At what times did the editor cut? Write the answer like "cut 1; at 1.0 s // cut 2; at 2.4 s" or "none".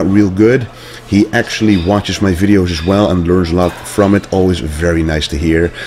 cut 1; at 4.5 s